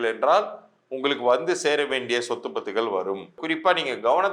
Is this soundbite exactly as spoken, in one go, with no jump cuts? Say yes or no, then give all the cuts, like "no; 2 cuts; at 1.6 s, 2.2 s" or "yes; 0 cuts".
no; 1 cut; at 3.4 s